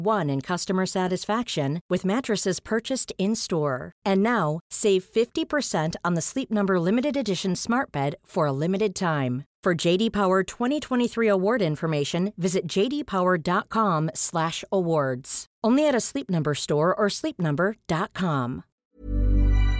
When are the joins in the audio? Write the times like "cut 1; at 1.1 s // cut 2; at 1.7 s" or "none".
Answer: cut 1; at 18.8 s